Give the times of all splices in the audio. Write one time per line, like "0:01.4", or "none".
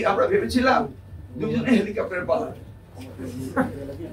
none